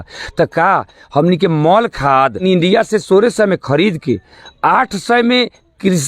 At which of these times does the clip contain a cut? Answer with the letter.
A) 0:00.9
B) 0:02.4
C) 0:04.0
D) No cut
B